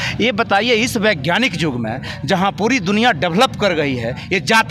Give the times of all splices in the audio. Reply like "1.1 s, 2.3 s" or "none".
none